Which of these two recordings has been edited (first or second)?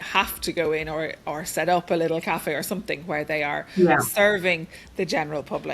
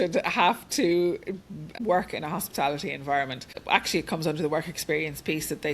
second